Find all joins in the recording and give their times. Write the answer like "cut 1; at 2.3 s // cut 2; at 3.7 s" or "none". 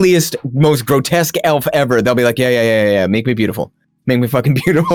none